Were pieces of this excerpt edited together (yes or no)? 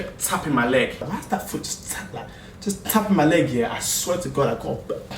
yes